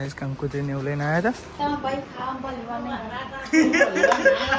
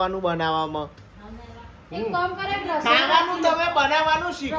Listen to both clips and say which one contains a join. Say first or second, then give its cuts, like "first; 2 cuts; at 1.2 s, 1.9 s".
first; 1 cut; at 1.5 s